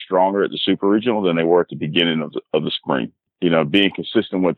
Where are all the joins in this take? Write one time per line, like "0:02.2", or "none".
0:03.2